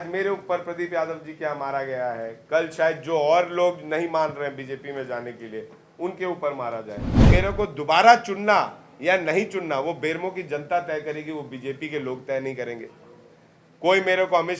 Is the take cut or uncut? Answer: cut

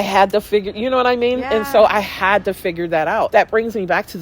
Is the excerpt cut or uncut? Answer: cut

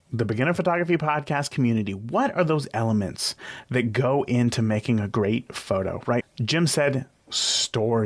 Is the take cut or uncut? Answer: cut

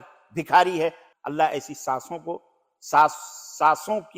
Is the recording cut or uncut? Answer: cut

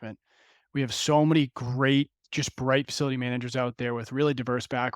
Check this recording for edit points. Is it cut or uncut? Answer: cut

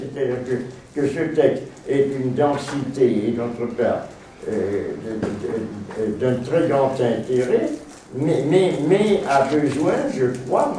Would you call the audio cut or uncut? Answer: cut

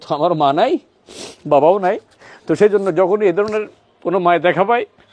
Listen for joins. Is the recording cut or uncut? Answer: uncut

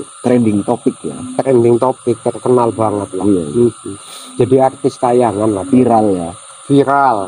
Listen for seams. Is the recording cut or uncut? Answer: uncut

